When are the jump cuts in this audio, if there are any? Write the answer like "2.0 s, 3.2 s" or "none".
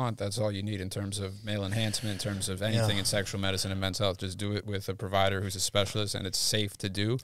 none